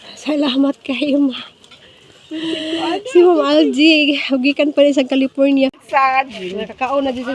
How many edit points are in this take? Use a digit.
1